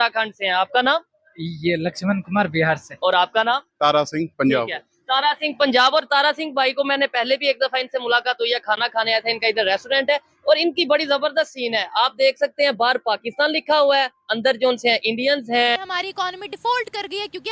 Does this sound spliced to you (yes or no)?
yes